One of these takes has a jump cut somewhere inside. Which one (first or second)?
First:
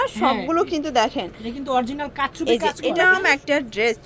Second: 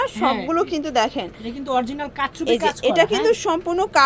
first